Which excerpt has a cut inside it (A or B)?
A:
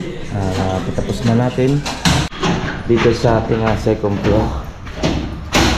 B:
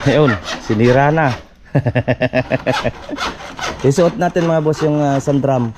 A